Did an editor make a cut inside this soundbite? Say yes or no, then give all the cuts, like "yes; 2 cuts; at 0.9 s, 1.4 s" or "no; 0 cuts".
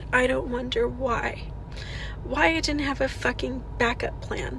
no; 0 cuts